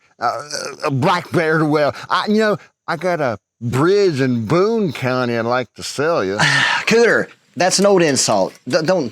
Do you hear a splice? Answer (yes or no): yes